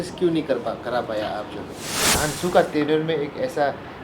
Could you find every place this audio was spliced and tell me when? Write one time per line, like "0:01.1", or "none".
0:02.2